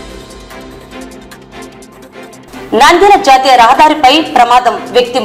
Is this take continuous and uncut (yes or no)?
yes